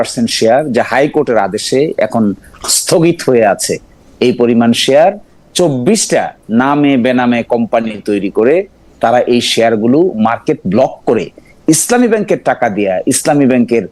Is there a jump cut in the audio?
no; 0 cuts

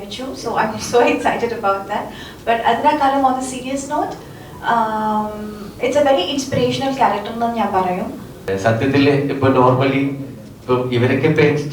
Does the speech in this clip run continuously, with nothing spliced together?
no; 1 cut; at 8.3 s

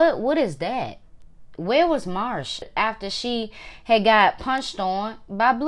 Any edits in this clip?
yes; 1 cut; at 2.8 s

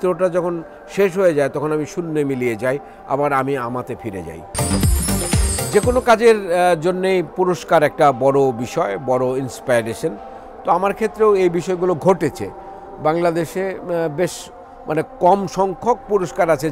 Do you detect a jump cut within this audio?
no; 0 cuts

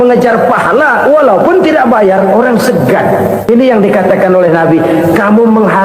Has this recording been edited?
yes; 1 cut; at 3.4 s

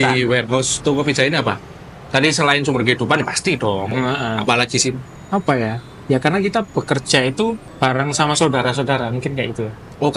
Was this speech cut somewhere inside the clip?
yes; 2 cuts; at 5.1 s, 7.7 s

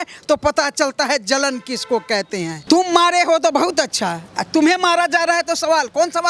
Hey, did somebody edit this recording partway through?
yes; 1 cut; at 2.6 s

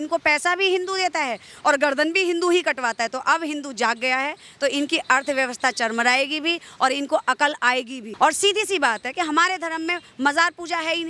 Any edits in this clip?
yes; 1 cut; at 8.0 s

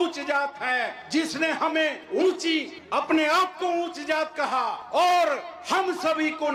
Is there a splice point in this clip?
no; 0 cuts

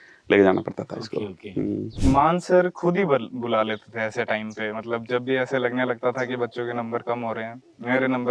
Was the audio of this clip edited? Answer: yes; 1 cut; at 1.9 s

